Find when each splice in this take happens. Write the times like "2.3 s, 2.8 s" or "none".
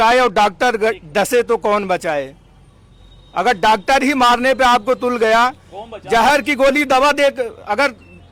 none